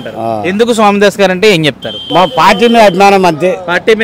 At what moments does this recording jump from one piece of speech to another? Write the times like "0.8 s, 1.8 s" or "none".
1.9 s